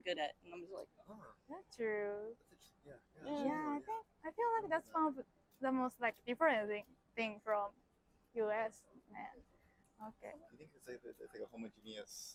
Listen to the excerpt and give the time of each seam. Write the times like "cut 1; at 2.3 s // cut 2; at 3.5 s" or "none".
none